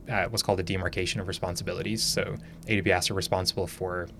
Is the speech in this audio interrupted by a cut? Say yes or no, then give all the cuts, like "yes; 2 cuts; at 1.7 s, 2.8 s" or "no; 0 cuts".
no; 0 cuts